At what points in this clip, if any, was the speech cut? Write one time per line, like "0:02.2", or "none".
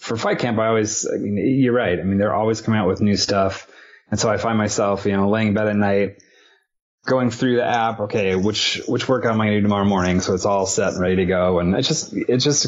none